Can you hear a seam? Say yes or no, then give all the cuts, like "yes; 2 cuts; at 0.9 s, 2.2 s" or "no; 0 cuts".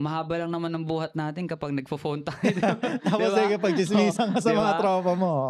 no; 0 cuts